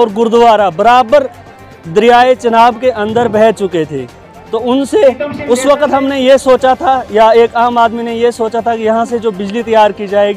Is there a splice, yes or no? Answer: no